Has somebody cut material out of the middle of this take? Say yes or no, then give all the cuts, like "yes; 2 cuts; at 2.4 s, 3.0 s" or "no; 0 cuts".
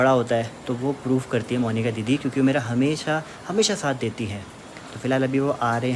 no; 0 cuts